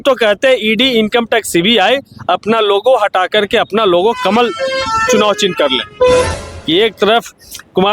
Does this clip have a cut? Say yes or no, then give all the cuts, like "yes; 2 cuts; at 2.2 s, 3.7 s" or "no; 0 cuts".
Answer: yes; 1 cut; at 6.4 s